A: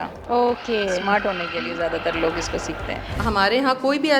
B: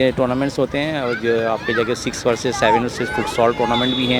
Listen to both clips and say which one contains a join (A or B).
A